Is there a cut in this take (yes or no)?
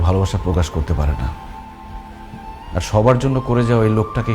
no